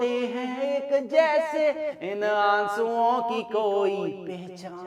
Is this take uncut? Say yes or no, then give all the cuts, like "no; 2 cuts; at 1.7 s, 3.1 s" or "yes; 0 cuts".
yes; 0 cuts